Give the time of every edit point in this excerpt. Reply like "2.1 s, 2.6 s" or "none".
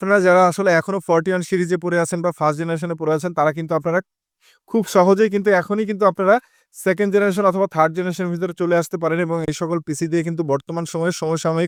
none